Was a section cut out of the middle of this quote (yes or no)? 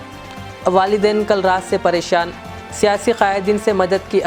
no